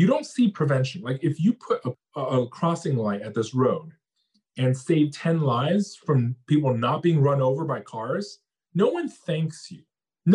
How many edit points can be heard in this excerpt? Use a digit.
0